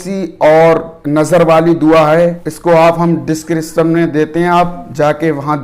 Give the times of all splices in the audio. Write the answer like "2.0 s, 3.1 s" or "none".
0.9 s, 2.5 s